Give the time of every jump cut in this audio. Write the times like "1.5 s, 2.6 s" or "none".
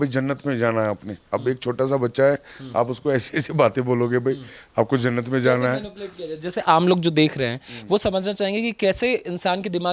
none